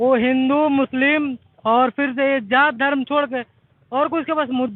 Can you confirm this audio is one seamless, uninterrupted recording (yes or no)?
yes